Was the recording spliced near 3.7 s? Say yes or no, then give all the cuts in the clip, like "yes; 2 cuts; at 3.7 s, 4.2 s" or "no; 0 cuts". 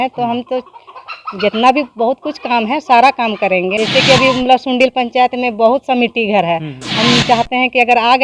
yes; 1 cut; at 3.7 s